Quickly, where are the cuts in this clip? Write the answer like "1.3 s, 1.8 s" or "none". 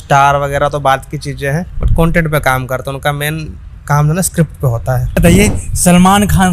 5.2 s